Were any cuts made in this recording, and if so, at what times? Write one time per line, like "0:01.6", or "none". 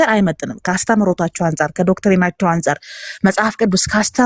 none